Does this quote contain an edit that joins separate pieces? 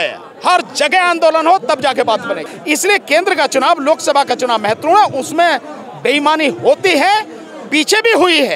yes; 1 cut; at 2.5 s

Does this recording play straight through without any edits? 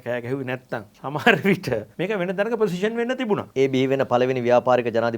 no; 3 cuts; at 0.9 s, 1.9 s, 3.5 s

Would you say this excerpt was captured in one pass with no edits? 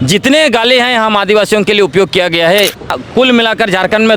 no; 1 cut; at 2.9 s

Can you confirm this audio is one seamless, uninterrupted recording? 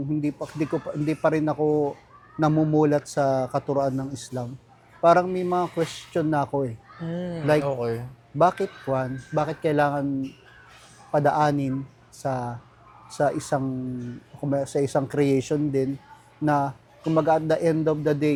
yes; 0 cuts

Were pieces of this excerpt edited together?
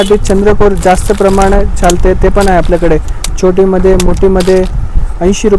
no; 0 cuts

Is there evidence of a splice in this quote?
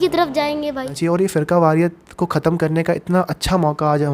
yes; 1 cut; at 0.9 s

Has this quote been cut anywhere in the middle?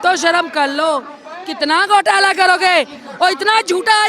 no; 0 cuts

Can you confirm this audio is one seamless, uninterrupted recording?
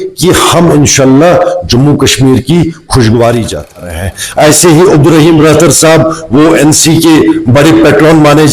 no; 1 cut; at 4.0 s

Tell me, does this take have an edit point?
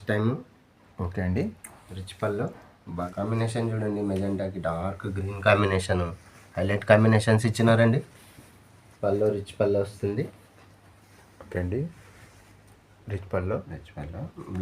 yes; 1 cut; at 3.1 s

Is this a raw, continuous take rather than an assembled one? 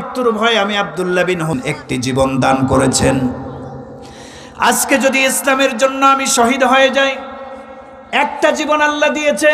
no; 1 cut; at 1.6 s

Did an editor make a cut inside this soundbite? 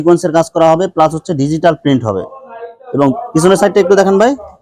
no; 0 cuts

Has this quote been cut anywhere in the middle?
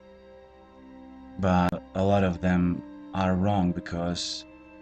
yes; 1 cut; at 2.9 s

